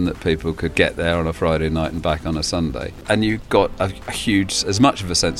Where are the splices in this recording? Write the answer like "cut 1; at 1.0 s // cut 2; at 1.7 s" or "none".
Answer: cut 1; at 0.7 s // cut 2; at 3.0 s

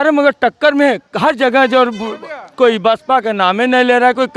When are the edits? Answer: none

